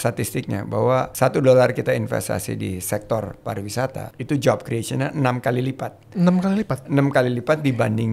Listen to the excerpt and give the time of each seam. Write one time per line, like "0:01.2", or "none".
0:01.1
0:04.1